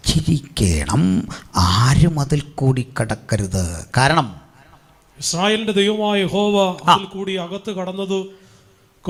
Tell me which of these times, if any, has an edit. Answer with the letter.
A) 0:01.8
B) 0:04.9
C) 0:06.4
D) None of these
D